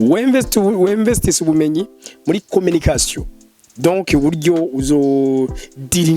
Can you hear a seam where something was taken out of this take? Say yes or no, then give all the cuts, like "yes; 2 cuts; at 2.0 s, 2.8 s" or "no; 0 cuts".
no; 0 cuts